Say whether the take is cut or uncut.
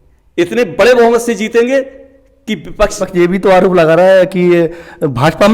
cut